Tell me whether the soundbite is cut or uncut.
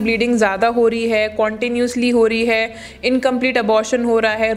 uncut